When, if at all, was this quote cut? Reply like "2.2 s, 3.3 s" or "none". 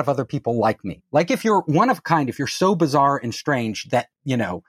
none